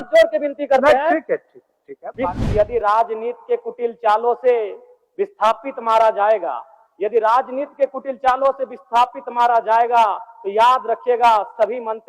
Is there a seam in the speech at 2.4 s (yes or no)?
yes